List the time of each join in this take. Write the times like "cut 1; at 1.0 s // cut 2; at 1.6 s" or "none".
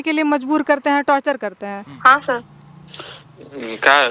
cut 1; at 1.9 s